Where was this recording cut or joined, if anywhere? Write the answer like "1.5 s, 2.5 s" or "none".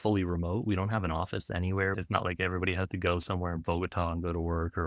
none